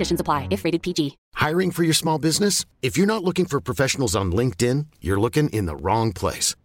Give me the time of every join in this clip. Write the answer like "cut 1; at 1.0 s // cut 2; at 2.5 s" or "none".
cut 1; at 1.2 s